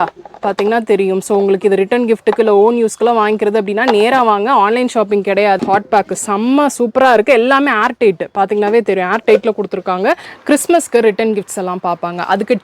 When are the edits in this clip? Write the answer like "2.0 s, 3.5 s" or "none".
5.6 s, 10.3 s